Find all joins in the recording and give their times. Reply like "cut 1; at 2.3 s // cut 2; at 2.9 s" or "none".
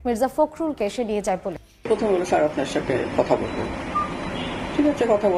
cut 1; at 1.7 s